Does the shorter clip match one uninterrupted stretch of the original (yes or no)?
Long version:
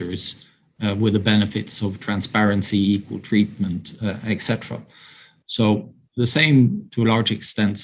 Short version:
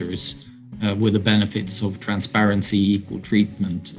yes